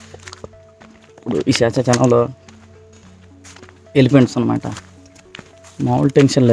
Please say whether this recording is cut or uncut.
uncut